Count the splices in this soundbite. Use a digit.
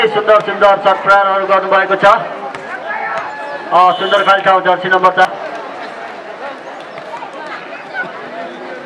1